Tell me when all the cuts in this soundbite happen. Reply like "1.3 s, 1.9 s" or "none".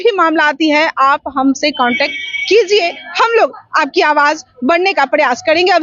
none